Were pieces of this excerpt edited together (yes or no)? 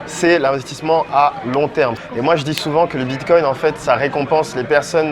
yes